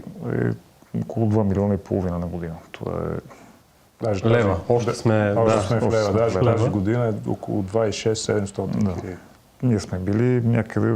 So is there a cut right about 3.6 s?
no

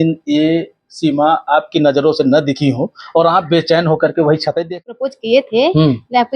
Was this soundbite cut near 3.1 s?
no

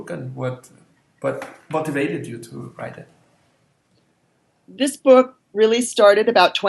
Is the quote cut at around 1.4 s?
yes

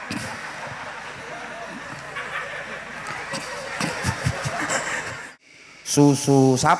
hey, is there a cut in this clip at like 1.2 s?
no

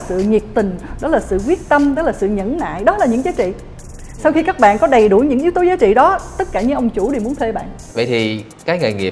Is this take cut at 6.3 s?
no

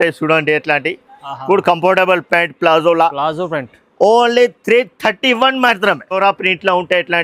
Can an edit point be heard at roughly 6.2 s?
yes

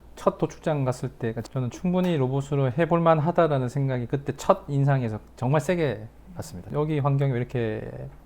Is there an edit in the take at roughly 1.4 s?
yes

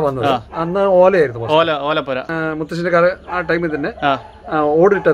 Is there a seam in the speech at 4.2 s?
no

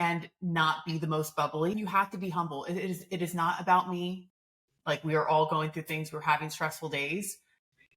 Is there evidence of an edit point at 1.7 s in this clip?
yes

